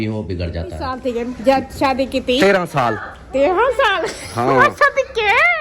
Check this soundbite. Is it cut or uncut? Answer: cut